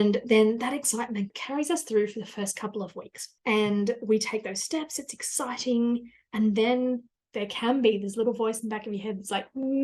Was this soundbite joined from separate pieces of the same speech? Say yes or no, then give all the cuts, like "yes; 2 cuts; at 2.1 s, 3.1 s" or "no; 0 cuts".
yes; 2 cuts; at 1.4 s, 7.1 s